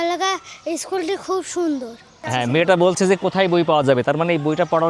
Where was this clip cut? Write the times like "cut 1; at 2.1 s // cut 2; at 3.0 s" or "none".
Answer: cut 1; at 2.2 s